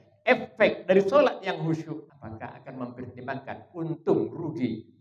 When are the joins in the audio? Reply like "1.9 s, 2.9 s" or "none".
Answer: 2.1 s